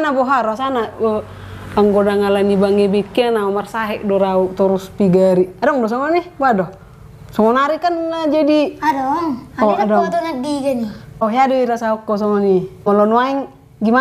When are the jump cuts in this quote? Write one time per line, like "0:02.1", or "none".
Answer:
0:11.2
0:12.9